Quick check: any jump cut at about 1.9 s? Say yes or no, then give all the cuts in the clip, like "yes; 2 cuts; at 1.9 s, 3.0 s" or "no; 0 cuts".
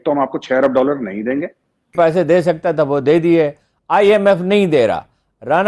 yes; 1 cut; at 1.9 s